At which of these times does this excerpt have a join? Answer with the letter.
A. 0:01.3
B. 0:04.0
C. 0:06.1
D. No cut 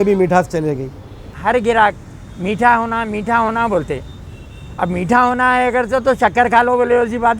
A